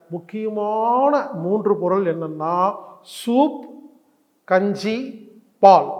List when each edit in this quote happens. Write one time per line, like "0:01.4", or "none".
none